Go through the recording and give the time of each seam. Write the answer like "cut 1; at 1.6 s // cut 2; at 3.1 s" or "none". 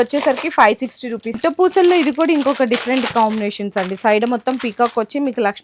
cut 1; at 1.4 s